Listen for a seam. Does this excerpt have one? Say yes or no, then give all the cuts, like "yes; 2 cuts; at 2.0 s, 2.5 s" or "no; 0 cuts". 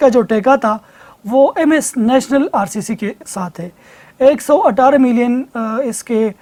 no; 0 cuts